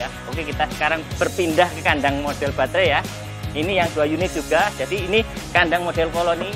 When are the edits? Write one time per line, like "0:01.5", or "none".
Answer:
none